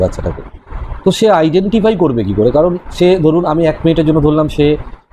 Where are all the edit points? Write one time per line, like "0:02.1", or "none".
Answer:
none